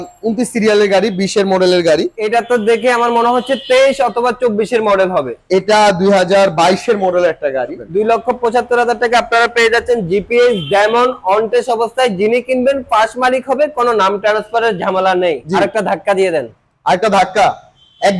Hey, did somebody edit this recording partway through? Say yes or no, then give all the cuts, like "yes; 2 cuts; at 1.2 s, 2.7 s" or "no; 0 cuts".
yes; 3 cuts; at 2.2 s, 7.8 s, 15.4 s